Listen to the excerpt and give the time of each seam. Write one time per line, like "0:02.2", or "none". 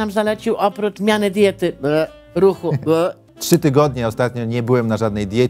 0:01.0
0:03.3

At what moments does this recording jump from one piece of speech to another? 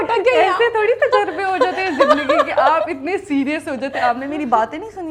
none

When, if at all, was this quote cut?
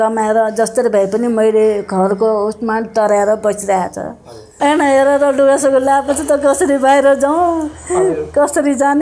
0:04.5

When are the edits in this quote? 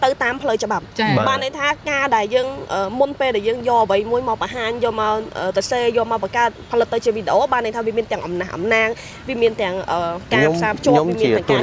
none

